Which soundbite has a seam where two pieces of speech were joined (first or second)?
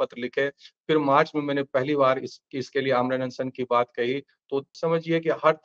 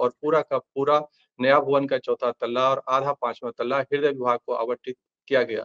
first